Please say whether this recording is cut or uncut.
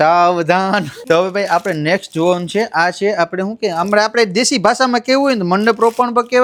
uncut